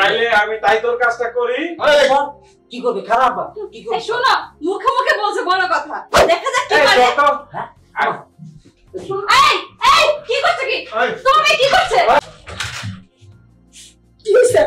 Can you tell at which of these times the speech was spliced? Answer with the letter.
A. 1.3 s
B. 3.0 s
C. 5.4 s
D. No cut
D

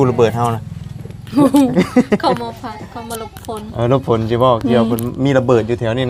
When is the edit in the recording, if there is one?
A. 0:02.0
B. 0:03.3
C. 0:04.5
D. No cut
D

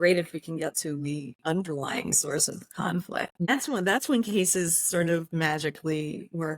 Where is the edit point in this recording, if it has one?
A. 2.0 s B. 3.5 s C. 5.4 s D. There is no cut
B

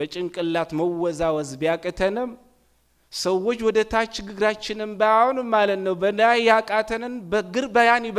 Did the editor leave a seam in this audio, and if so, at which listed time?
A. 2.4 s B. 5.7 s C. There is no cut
C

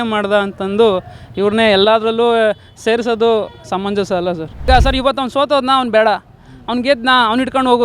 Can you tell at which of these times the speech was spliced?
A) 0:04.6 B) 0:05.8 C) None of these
A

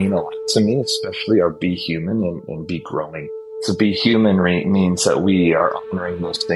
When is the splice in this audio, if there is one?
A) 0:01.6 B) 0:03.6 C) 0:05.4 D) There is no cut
B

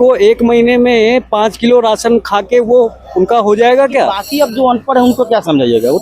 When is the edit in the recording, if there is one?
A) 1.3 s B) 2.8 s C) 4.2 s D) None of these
C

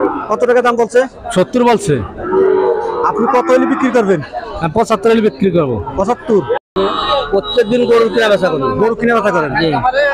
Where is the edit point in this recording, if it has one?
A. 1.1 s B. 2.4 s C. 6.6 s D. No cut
C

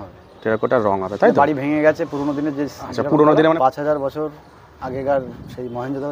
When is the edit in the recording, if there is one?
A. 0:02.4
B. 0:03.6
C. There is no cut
B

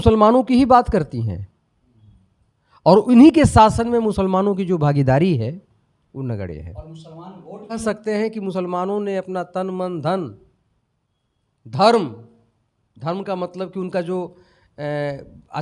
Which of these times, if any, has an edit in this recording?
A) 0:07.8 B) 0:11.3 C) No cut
A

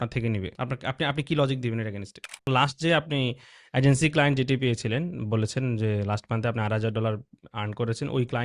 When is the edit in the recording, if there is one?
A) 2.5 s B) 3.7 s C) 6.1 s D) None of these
A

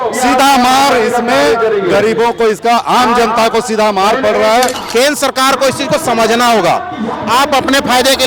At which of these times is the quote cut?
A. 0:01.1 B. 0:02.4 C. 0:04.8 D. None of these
C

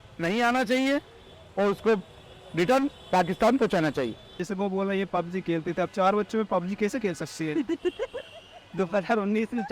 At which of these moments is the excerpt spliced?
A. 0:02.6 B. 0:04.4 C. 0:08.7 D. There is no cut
B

